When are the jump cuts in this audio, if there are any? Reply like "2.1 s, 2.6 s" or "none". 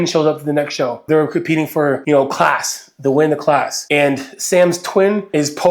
1.0 s